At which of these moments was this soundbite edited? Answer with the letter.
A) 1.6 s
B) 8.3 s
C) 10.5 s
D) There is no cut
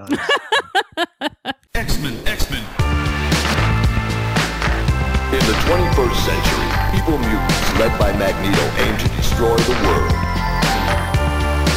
A